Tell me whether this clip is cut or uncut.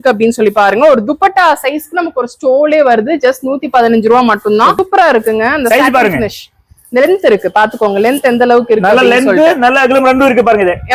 cut